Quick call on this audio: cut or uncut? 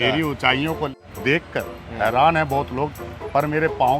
cut